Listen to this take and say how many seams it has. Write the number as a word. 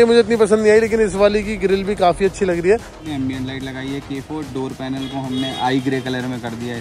one